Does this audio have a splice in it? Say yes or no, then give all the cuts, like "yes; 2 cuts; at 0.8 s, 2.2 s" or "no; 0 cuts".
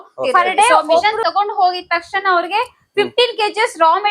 yes; 1 cut; at 1.0 s